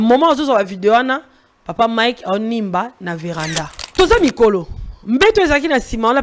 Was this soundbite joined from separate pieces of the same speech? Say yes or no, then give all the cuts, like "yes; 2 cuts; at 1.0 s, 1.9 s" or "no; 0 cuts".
yes; 1 cut; at 3.8 s